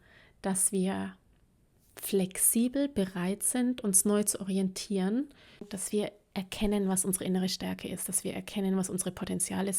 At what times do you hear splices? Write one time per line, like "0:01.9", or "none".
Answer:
0:05.7